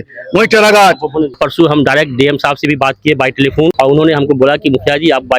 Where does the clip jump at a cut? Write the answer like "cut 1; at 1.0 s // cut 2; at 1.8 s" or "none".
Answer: cut 1; at 1.4 s // cut 2; at 3.7 s